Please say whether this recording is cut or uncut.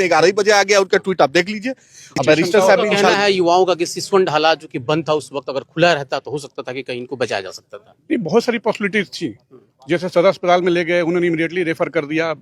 cut